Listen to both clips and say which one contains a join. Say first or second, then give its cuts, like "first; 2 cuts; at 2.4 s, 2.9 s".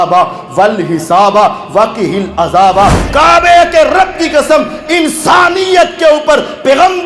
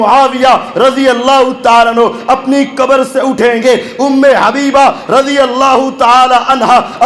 first; 1 cut; at 3.0 s